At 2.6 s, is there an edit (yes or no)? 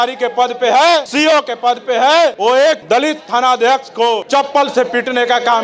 yes